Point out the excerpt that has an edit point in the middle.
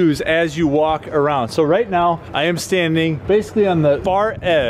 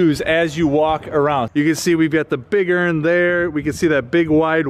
second; 1 cut; at 1.5 s

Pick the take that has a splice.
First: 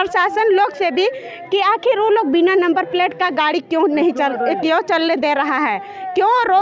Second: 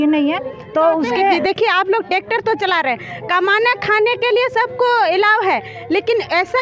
second; 1 cut; at 1.4 s

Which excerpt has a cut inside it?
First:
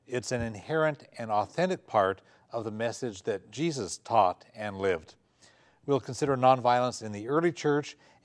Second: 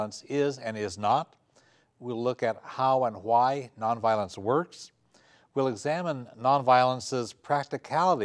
first; 1 cut; at 2.3 s

